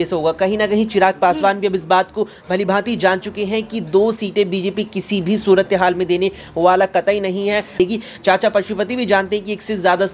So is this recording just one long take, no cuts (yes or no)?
no